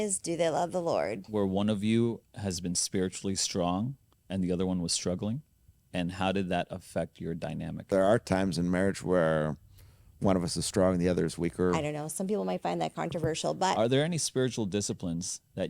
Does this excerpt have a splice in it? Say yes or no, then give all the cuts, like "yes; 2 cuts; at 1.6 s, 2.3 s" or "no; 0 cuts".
yes; 4 cuts; at 1.2 s, 7.9 s, 11.8 s, 13.8 s